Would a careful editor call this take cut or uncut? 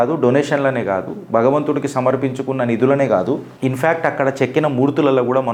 uncut